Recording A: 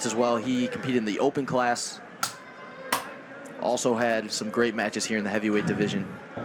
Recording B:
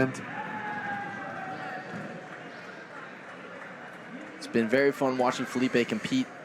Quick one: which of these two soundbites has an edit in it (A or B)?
B